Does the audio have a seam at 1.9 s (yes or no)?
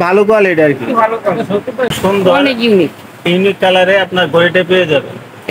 yes